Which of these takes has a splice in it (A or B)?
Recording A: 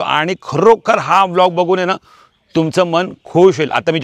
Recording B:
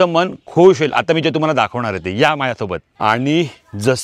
B